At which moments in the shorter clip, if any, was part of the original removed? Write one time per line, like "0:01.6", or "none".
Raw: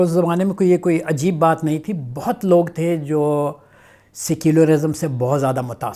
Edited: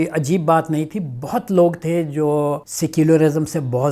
0:02.7